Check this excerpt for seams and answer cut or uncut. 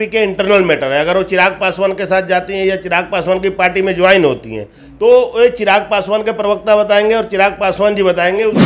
uncut